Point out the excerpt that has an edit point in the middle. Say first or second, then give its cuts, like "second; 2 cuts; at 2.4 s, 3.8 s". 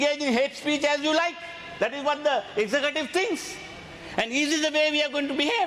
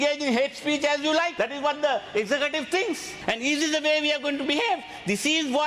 second; 2 cuts; at 1.3 s, 3.1 s